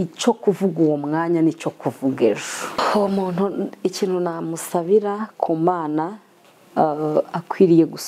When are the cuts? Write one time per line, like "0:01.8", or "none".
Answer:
0:02.8